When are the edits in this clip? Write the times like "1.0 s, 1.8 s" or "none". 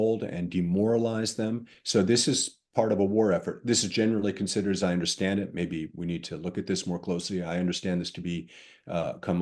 none